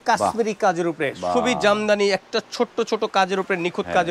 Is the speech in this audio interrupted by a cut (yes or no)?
no